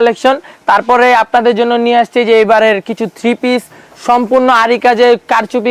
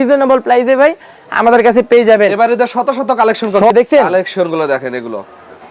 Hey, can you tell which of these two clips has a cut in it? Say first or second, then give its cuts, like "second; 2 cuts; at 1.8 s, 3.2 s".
second; 1 cut; at 3.7 s